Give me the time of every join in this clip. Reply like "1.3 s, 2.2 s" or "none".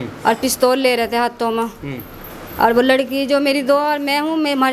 none